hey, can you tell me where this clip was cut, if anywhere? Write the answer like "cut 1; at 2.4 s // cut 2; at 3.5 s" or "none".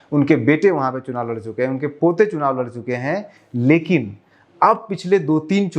none